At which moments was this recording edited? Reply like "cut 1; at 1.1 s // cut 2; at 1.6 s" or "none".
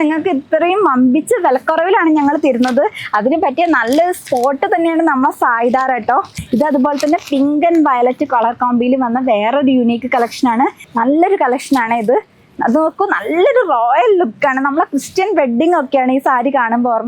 cut 1; at 6.4 s // cut 2; at 10.8 s